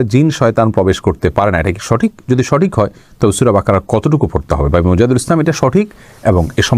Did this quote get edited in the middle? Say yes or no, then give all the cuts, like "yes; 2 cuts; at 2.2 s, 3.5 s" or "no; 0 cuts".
no; 0 cuts